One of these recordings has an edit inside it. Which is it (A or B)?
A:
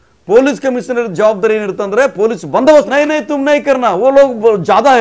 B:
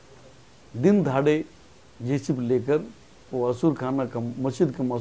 A